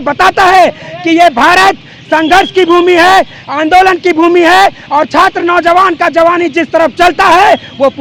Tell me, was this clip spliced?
no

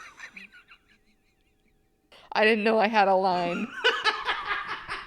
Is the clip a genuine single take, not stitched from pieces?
no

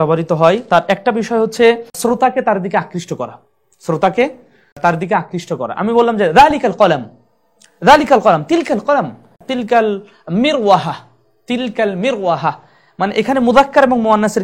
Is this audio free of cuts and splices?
yes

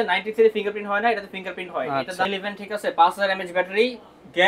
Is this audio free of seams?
no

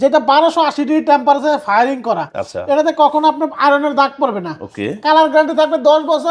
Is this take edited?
no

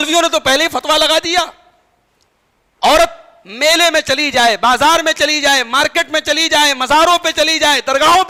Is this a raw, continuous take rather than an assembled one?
yes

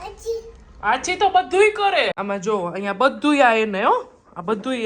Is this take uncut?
no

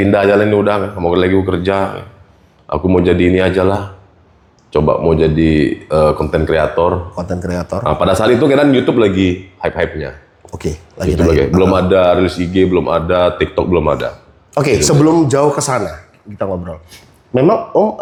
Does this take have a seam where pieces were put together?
no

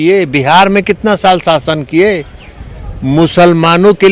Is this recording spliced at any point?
no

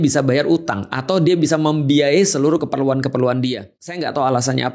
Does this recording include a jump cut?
yes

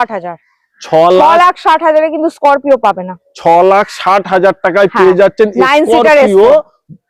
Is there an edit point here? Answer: no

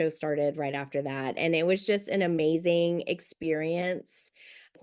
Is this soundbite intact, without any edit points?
yes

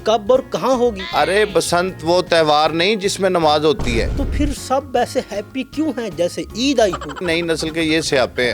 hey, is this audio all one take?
no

